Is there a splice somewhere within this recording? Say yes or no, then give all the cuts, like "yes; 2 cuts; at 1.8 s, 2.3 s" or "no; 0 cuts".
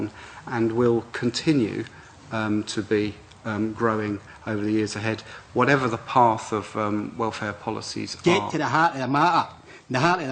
yes; 1 cut; at 8.0 s